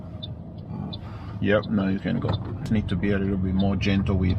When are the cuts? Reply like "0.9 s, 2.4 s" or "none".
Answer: 2.6 s